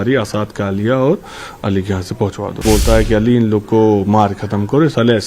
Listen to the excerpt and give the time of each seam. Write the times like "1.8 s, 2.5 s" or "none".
2.6 s